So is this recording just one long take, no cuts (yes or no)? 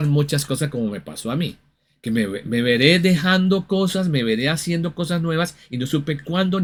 yes